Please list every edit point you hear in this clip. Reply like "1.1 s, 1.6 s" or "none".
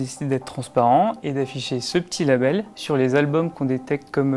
none